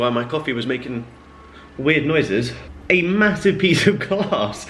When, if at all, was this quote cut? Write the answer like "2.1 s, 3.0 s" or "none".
2.6 s